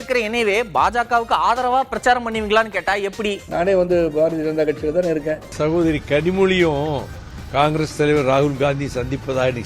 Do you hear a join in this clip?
yes; 2 cuts; at 3.4 s, 5.5 s

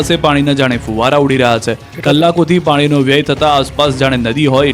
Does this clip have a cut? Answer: yes; 1 cut; at 3.7 s

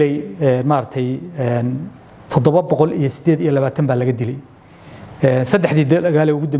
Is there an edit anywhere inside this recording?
no; 0 cuts

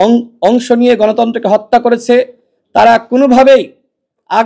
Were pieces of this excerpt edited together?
no; 0 cuts

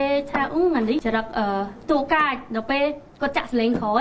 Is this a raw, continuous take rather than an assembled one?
no; 1 cut; at 1.0 s

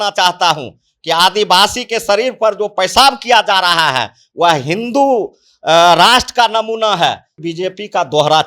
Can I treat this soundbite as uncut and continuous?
no; 1 cut; at 7.3 s

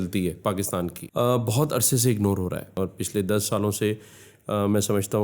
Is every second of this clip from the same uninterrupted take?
no; 2 cuts; at 1.0 s, 2.7 s

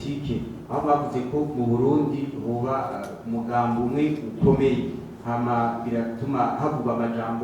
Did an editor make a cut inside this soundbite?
no; 0 cuts

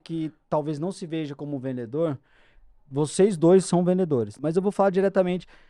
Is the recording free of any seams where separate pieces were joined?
no; 1 cut; at 4.4 s

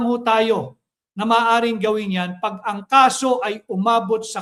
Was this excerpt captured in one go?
yes; 0 cuts

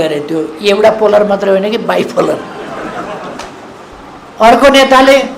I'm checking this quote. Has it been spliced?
yes; 1 cut; at 3.9 s

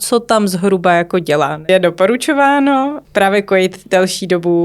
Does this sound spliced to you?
yes; 2 cuts; at 1.7 s, 3.0 s

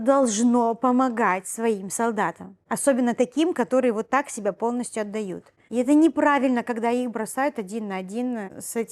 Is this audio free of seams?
yes; 0 cuts

